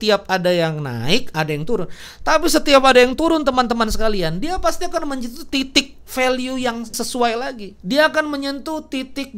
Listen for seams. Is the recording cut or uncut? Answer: cut